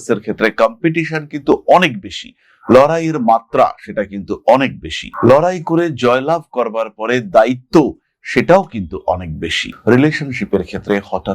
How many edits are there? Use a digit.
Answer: 1